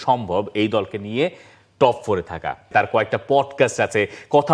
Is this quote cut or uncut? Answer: cut